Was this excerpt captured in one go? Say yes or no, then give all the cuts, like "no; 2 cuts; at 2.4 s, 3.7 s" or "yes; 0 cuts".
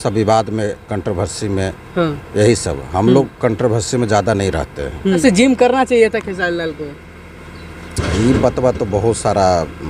no; 1 cut; at 5.2 s